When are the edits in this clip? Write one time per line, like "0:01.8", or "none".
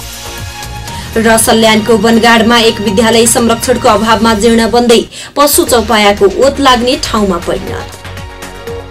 0:07.7